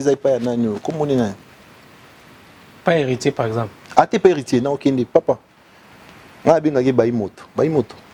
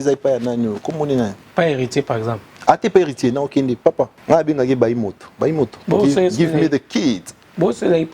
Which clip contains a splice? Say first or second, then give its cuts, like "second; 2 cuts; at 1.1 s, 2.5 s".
second; 3 cuts; at 1.4 s, 4.2 s, 5.8 s